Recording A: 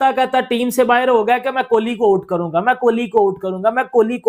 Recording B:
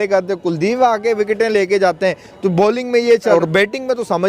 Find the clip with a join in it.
B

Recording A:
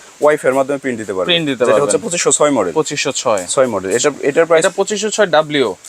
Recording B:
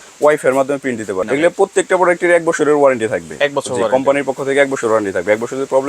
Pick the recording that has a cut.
B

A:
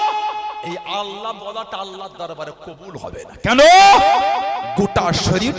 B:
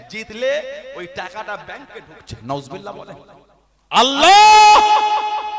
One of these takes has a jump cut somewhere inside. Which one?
B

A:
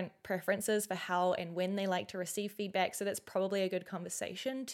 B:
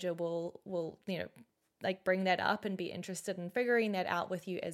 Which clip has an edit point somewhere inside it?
B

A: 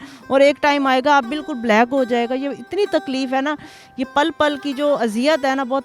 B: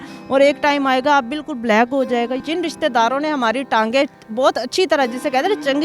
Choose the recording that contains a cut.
B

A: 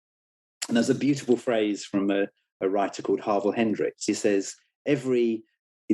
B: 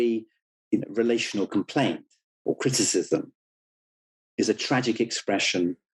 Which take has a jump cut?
A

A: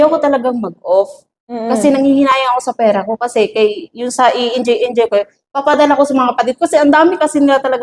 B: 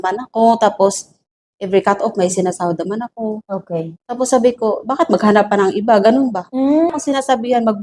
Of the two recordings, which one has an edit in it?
B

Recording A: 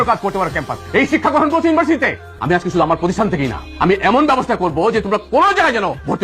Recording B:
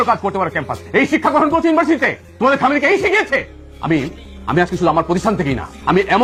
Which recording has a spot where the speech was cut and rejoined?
A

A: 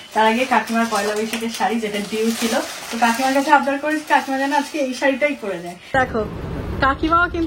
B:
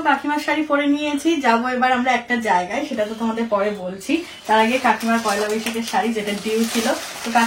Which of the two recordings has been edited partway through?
A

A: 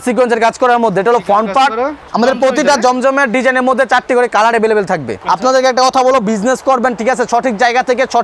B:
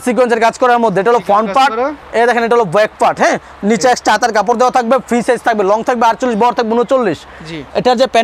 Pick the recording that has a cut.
A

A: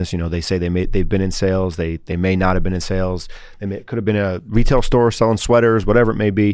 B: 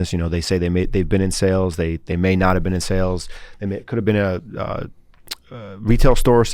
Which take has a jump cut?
A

